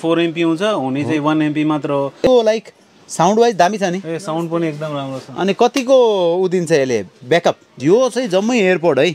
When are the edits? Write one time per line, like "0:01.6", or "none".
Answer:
0:02.3
0:07.7